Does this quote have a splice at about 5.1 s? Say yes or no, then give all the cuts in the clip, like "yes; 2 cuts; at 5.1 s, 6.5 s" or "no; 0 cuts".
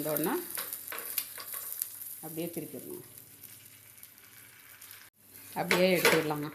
yes; 1 cut; at 5.1 s